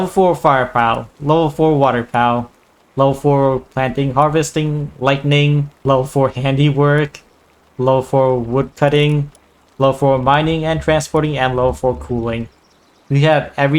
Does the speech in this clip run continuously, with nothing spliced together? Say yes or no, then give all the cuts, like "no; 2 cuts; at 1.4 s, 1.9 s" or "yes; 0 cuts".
no; 2 cuts; at 5.8 s, 8.7 s